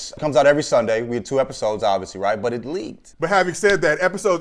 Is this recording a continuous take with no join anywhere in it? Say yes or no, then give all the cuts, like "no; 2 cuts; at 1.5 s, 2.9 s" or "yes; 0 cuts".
no; 1 cut; at 3.0 s